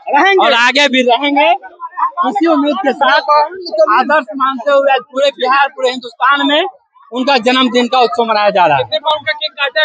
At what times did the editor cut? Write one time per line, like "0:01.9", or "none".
none